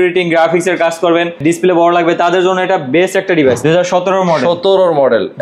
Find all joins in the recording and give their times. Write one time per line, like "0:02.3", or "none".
0:01.4
0:03.6

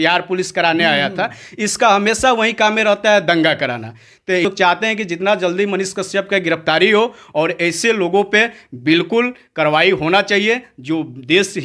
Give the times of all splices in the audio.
0:04.4

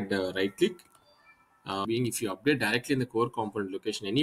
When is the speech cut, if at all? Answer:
0:01.9

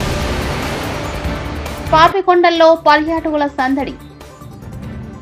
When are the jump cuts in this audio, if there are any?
0:01.8

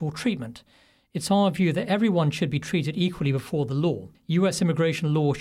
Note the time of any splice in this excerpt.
0:04.1

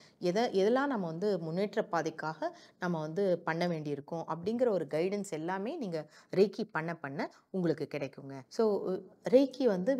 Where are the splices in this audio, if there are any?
none

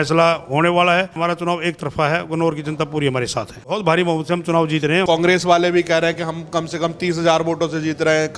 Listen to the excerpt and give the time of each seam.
0:01.2
0:03.8
0:05.1

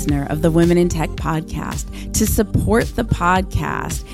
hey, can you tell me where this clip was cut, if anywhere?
none

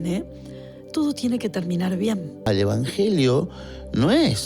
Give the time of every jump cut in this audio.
0:02.5

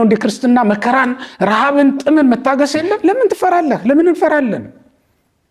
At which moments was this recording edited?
0:03.0

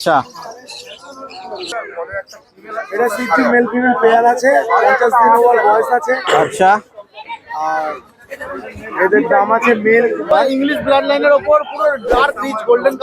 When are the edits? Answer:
0:01.7
0:10.3

